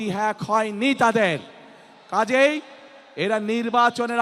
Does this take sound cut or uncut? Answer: uncut